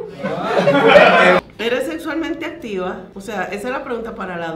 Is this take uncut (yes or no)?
no